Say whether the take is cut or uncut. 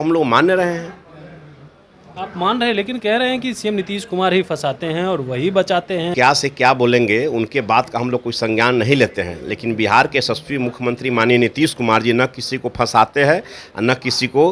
cut